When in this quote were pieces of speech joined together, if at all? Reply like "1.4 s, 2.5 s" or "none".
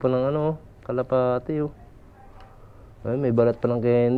none